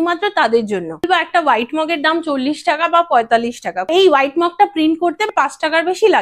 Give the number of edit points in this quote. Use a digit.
3